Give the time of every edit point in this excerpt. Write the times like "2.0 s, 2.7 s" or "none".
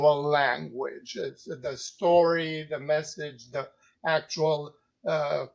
none

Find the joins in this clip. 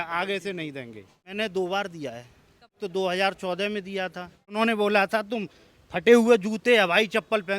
1.3 s, 2.8 s, 4.5 s

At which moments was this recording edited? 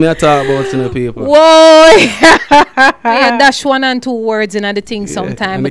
3.3 s

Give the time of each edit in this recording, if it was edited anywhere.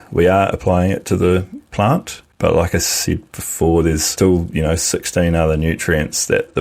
2.2 s, 4.1 s

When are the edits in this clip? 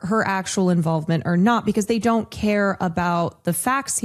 none

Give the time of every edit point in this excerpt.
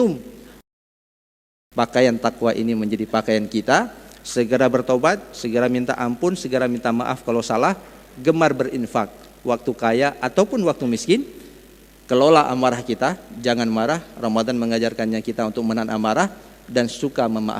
1.0 s

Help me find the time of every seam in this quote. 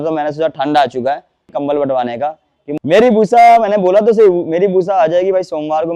2.7 s

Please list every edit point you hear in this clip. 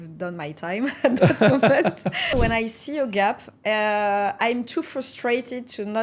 2.3 s

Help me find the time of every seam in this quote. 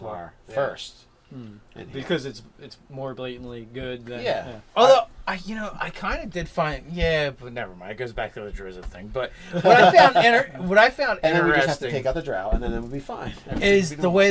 1.9 s

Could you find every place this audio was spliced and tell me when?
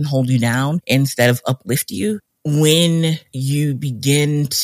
2.2 s

